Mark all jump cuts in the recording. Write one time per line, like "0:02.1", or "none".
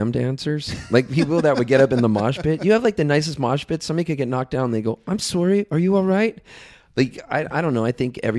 none